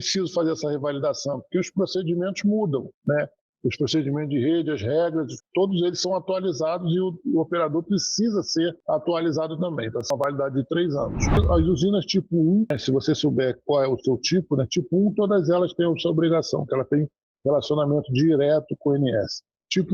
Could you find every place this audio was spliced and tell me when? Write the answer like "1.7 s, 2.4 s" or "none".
11.3 s